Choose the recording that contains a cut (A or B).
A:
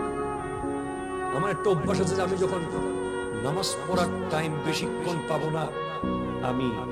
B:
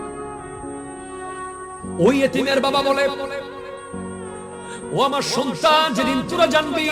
B